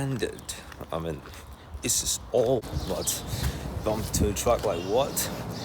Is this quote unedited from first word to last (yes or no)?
no